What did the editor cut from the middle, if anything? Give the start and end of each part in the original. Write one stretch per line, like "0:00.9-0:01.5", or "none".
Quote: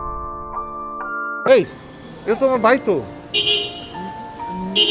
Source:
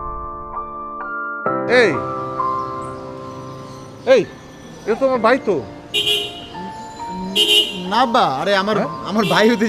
0:01.5-0:04.1